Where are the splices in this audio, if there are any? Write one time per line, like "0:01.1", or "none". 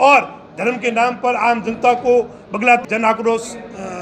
0:02.8